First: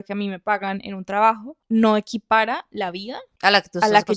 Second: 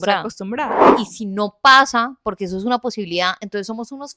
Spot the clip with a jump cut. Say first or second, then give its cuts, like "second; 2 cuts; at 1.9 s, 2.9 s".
second; 1 cut; at 0.9 s